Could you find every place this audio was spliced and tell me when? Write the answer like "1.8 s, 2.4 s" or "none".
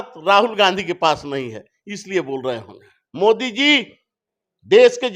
3.0 s